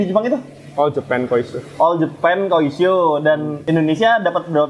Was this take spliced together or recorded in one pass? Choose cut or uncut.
uncut